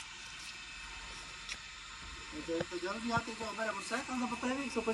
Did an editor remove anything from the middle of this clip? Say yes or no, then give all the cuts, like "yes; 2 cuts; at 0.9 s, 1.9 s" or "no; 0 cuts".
no; 0 cuts